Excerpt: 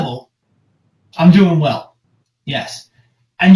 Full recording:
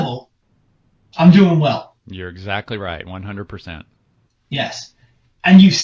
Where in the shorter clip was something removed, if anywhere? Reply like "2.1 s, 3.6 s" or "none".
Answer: 2.0 s